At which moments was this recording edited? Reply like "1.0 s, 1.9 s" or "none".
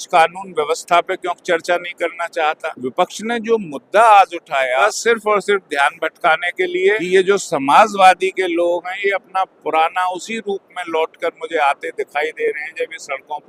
2.7 s, 4.8 s, 7.0 s